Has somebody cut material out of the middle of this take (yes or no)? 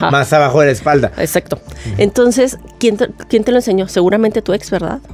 no